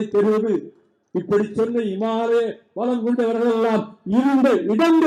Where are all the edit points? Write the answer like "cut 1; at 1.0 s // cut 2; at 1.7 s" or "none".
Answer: none